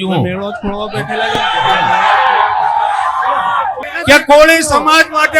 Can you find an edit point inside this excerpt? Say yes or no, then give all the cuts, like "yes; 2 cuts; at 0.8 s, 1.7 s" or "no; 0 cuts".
yes; 1 cut; at 3.9 s